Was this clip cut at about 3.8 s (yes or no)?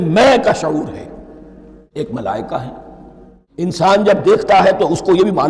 yes